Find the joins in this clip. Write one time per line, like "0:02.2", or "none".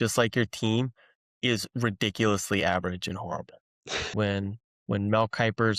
0:04.1